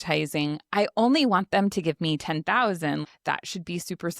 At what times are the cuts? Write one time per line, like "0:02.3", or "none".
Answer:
0:03.0